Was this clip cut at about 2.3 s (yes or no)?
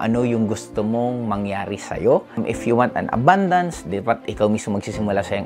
yes